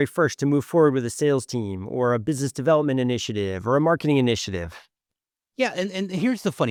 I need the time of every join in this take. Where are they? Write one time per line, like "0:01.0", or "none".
none